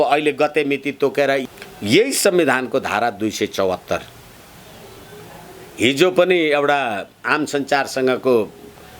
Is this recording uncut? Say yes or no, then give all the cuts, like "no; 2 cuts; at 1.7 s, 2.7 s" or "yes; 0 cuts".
no; 2 cuts; at 1.4 s, 5.0 s